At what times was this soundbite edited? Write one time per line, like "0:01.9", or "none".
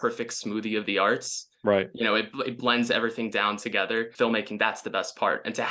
0:04.1